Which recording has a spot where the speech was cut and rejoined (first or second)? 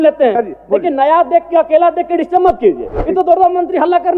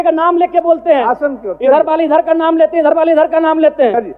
first